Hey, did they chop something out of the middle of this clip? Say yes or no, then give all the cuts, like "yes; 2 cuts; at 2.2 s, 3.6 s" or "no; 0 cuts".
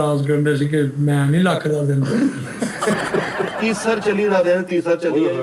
yes; 1 cut; at 3.6 s